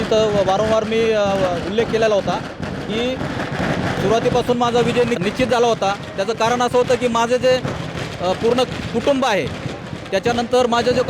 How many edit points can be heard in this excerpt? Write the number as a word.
one